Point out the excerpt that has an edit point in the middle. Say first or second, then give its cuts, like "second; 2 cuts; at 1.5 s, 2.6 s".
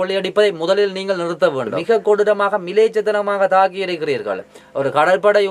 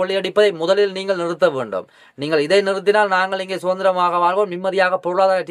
first; 1 cut; at 1.8 s